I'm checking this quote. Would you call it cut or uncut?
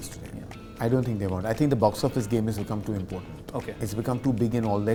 uncut